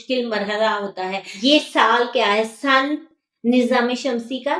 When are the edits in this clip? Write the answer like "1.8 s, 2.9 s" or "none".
1.3 s